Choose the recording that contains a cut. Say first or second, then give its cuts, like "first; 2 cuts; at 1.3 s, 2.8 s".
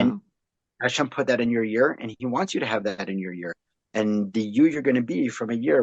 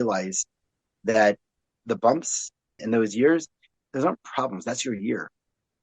second; 3 cuts; at 1.8 s, 2.8 s, 3.7 s